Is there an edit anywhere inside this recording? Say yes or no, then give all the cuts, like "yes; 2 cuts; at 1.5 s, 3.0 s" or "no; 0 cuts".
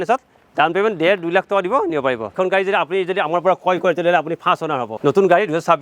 yes; 2 cuts; at 2.4 s, 4.9 s